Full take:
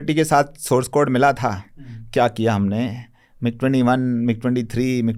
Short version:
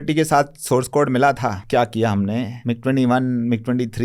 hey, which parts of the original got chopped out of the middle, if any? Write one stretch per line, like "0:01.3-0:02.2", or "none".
0:01.6-0:02.0
0:03.0-0:03.3